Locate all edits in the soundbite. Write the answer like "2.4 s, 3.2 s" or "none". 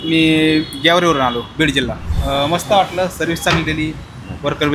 2.1 s